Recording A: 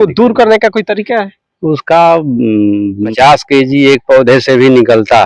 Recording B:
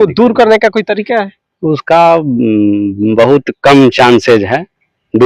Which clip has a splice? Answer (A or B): A